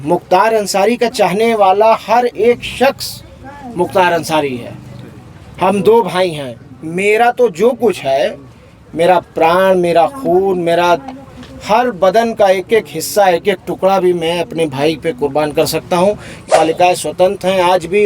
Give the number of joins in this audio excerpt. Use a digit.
1